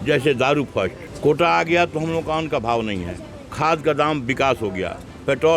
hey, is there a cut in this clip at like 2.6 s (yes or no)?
no